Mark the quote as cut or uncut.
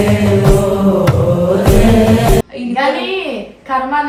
uncut